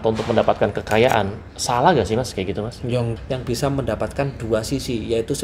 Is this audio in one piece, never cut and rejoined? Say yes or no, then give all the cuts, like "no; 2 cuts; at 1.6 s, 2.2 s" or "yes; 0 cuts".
no; 1 cut; at 3.1 s